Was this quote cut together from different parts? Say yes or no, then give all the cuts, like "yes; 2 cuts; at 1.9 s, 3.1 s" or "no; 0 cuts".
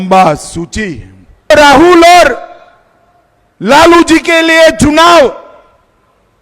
yes; 1 cut; at 1.5 s